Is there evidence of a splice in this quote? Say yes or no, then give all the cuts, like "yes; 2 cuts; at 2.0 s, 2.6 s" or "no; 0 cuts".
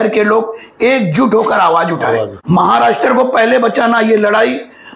yes; 1 cut; at 2.3 s